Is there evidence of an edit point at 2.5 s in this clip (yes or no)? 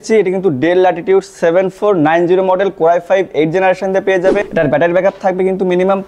no